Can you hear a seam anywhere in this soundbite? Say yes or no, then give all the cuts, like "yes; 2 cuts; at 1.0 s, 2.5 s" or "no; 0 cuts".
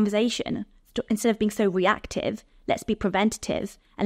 no; 0 cuts